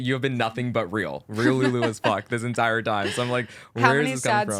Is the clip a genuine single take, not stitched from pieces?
yes; 0 cuts

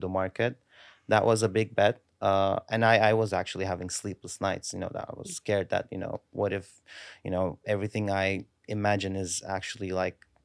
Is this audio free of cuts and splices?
yes; 0 cuts

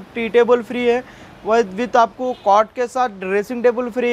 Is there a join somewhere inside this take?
no; 0 cuts

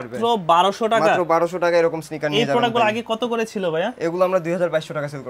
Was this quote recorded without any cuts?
yes; 0 cuts

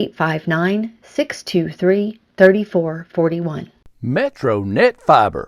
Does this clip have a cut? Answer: yes; 1 cut; at 3.8 s

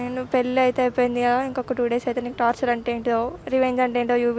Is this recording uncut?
no; 1 cut; at 3.4 s

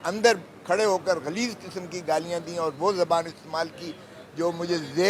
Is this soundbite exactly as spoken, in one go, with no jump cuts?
yes; 0 cuts

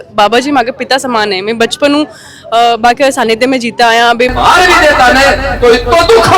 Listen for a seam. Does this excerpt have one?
yes; 1 cut; at 4.3 s

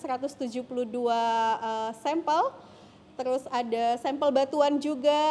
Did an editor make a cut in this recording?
no; 0 cuts

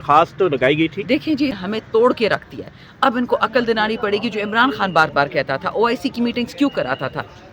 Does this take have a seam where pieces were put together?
yes; 1 cut; at 1.6 s

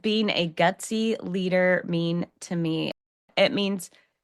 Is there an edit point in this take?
yes; 1 cut; at 2.9 s

